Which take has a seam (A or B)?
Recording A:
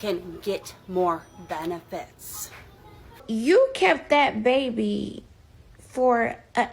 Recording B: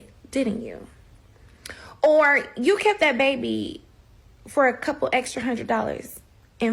A